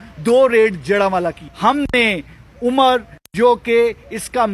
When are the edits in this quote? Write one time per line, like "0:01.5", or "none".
0:01.5